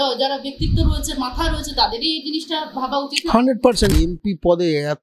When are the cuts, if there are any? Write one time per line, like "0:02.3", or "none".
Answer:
0:03.9